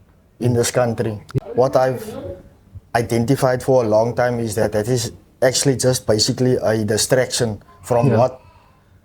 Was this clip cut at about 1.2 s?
yes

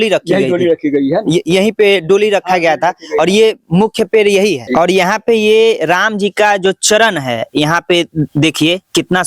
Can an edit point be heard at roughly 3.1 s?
no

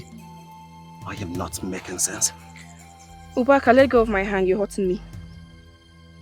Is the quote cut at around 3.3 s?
no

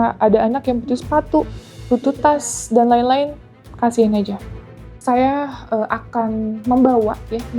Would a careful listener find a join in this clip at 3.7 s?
no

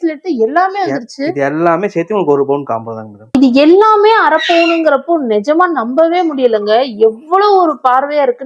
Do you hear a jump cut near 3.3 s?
yes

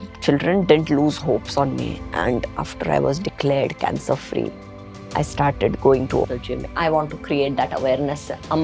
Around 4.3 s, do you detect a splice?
no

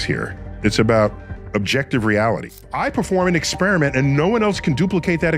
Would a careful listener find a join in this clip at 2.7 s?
yes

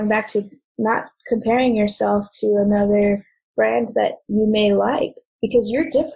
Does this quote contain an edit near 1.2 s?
no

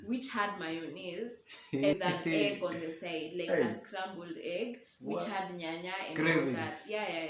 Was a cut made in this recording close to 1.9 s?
yes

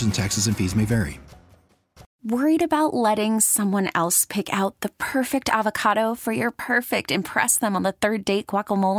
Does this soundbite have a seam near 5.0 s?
no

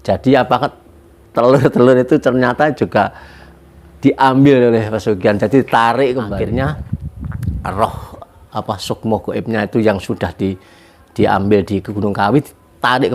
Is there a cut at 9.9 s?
no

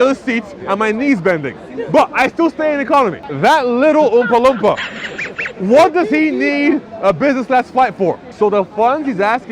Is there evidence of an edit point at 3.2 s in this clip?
yes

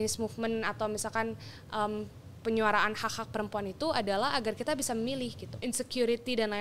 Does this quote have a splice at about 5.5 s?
yes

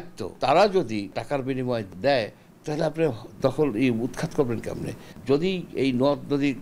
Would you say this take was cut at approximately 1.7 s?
no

